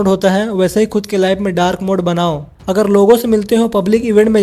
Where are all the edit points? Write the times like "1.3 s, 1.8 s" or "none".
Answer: 2.5 s